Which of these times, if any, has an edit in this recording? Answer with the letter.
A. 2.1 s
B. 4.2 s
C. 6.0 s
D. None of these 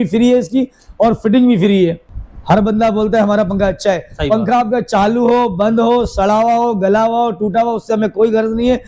A